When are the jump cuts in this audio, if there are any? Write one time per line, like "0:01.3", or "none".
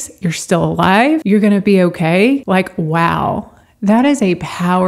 0:01.2
0:02.4